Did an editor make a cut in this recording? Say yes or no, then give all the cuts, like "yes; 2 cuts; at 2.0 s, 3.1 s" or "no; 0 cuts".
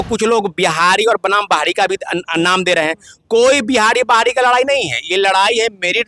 no; 0 cuts